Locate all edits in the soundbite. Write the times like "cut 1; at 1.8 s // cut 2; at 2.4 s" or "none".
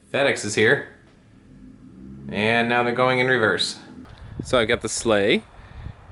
cut 1; at 4.1 s